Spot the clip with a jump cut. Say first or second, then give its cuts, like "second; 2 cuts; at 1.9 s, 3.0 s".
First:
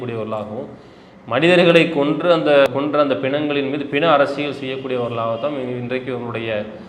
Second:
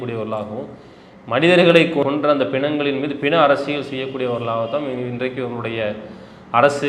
second; 1 cut; at 2.0 s